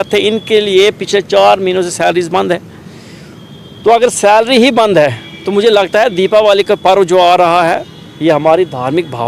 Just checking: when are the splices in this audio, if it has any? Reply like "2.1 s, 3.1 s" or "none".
none